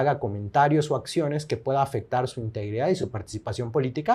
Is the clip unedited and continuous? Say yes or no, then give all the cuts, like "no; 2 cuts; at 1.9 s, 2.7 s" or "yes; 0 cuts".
yes; 0 cuts